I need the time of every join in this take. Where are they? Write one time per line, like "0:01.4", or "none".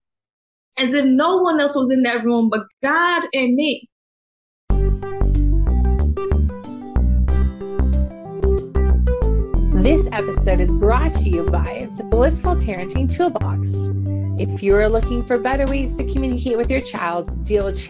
0:04.6